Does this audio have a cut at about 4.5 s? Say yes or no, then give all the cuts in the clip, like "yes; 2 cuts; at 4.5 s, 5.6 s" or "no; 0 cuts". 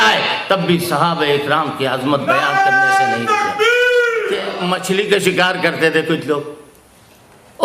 yes; 1 cut; at 4.5 s